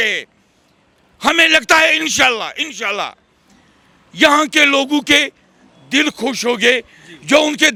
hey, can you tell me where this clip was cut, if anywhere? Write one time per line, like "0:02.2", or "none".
none